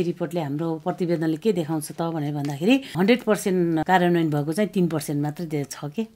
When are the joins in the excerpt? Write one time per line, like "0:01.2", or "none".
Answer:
0:02.9
0:03.8